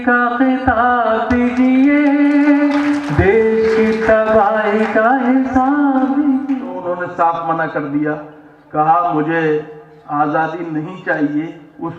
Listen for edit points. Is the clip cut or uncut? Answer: cut